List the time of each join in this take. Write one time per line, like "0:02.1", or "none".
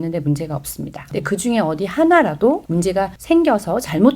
0:01.0
0:02.9